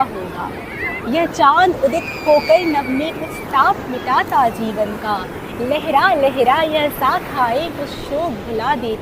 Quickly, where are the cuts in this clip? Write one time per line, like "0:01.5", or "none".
none